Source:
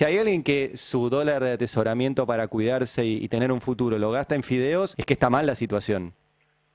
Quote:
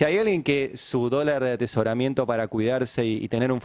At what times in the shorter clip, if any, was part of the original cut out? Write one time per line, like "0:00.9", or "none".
none